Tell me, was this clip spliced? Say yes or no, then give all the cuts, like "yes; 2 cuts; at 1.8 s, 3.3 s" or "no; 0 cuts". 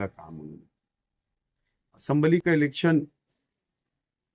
no; 0 cuts